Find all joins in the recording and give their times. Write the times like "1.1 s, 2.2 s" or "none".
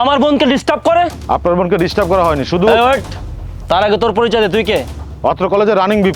5.0 s